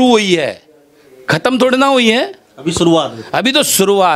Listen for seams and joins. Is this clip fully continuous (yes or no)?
yes